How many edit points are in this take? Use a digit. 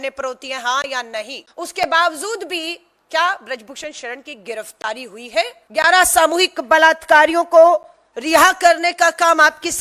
2